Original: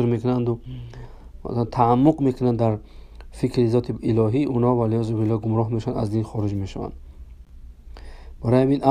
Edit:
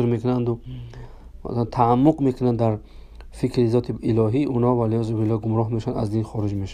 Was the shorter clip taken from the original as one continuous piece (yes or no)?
yes